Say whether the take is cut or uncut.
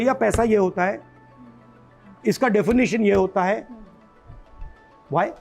uncut